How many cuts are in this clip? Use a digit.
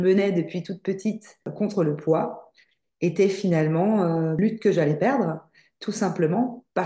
2